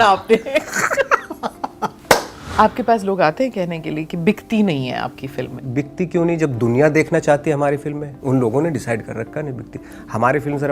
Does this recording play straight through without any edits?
no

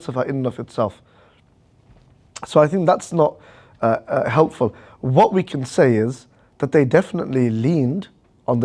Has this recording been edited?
no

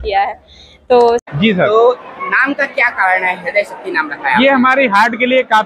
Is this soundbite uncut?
no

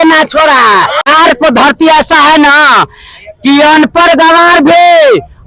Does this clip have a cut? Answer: yes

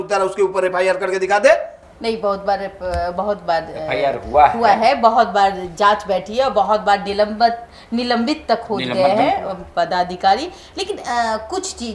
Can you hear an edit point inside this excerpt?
no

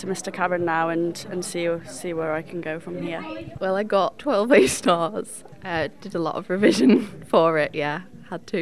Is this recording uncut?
no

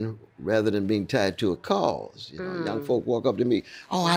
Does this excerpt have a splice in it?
no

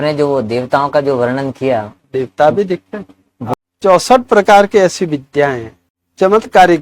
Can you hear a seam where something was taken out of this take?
yes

